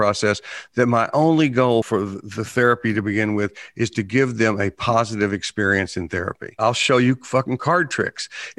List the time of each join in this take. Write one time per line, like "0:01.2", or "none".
0:01.9
0:06.7